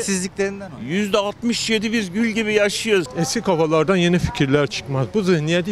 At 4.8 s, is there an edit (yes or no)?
no